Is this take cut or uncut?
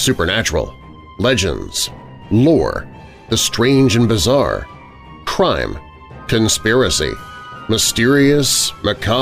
uncut